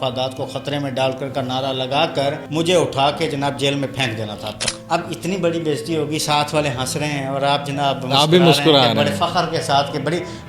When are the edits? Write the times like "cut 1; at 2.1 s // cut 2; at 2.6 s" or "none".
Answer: cut 1; at 2.4 s // cut 2; at 4.5 s